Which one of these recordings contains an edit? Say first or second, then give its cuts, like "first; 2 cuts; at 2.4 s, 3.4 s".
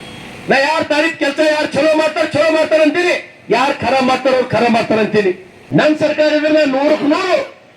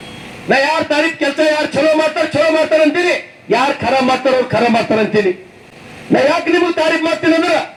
first; 1 cut; at 5.5 s